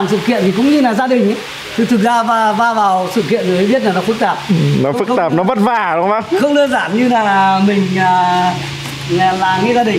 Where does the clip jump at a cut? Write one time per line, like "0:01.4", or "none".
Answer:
none